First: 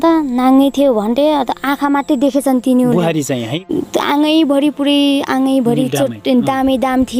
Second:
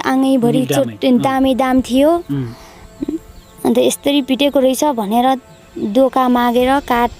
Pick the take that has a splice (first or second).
first